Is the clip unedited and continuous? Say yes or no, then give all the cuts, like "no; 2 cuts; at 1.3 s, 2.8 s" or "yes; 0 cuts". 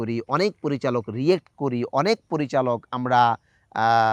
yes; 0 cuts